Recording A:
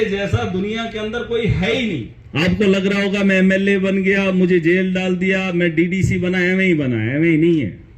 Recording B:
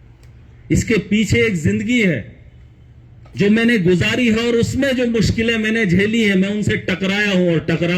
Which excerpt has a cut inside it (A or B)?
A